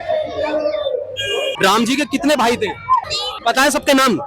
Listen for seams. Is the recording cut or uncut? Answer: cut